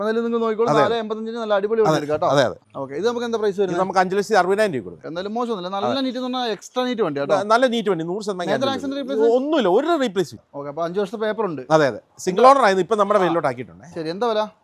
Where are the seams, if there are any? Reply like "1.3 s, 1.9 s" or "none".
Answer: 2.6 s, 5.0 s, 10.4 s